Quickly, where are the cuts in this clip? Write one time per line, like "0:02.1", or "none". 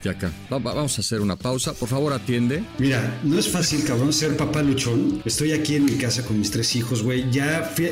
0:02.7
0:05.2

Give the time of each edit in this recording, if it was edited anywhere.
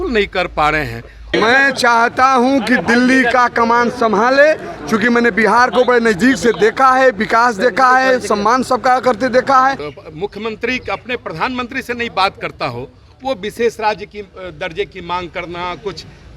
0:01.3
0:09.9

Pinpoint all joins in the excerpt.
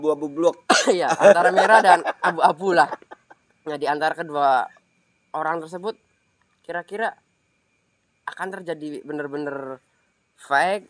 none

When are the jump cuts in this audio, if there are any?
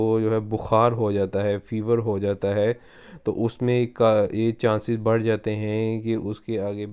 none

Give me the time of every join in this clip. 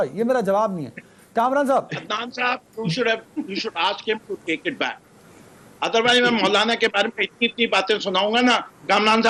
none

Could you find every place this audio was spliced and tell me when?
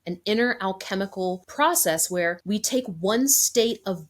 0:01.4
0:02.4

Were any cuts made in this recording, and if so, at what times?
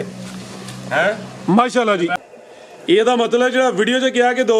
0:02.1

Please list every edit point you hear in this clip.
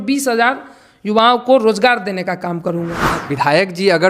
0:03.1

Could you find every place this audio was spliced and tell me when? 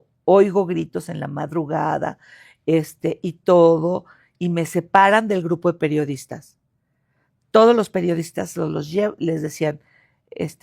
none

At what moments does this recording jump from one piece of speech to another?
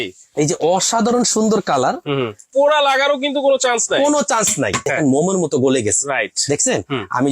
0:02.5
0:04.9

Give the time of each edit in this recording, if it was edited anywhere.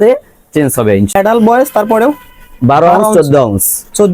0:01.1

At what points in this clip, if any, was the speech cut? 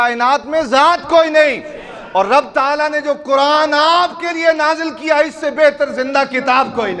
none

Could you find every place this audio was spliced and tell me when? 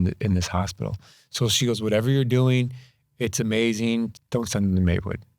0:04.2

